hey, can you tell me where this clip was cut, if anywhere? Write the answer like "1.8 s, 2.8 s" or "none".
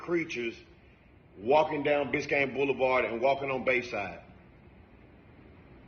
none